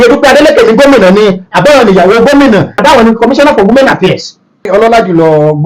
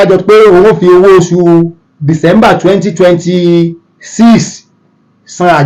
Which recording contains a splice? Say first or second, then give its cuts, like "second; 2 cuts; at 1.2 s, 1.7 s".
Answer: first; 2 cuts; at 2.8 s, 4.6 s